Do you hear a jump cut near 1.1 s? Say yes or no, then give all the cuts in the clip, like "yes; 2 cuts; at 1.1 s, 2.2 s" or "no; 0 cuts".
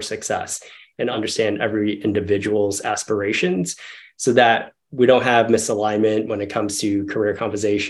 yes; 1 cut; at 1.1 s